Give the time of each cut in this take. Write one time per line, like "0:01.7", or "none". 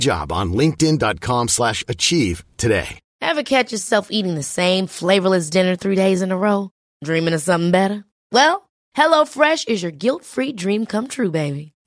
0:03.0